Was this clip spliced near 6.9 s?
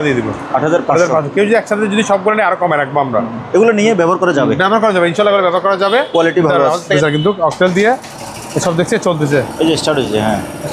yes; 1 cut; at 6.9 s

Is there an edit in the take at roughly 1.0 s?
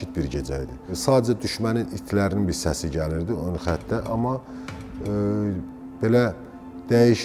yes; 1 cut; at 1.0 s

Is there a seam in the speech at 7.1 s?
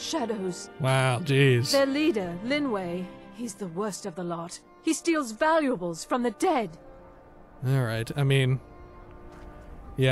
no; 0 cuts

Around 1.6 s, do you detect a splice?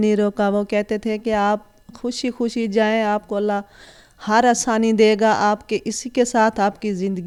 no; 0 cuts

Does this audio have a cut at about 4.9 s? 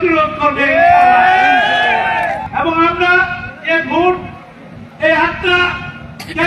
no; 1 cut; at 2.4 s

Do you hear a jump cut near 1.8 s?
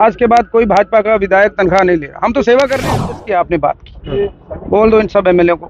no; 1 cut; at 3.2 s

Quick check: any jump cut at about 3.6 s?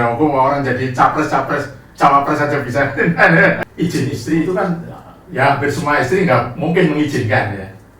yes; 1 cut; at 3.6 s

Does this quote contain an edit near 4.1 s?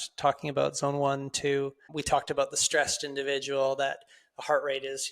no; 1 cut; at 1.9 s

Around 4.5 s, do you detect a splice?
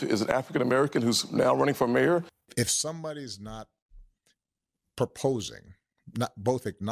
no; 1 cut; at 2.5 s

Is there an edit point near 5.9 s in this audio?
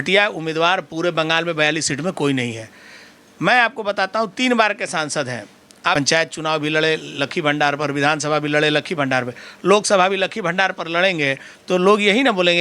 yes; 1 cut; at 5.9 s

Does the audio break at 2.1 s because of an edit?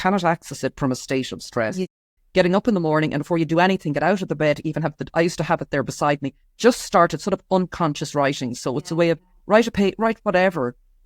yes; 1 cut; at 2.1 s

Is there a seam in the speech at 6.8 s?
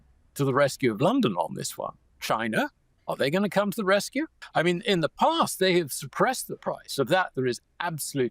no; 3 cuts; at 2.1 s, 2.9 s, 4.4 s

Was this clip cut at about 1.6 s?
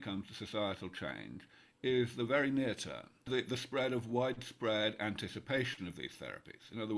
no; 1 cut; at 3.3 s

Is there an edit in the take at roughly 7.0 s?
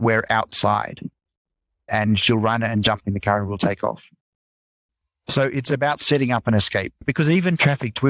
yes; 2 cuts; at 1.9 s, 7.0 s

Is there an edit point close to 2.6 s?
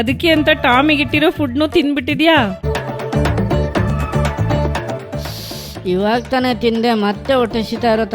yes; 1 cut; at 2.6 s

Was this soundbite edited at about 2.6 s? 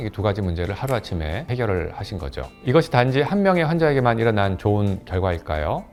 no; 0 cuts

